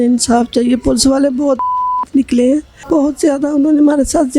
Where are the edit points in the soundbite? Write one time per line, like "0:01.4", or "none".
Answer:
0:02.7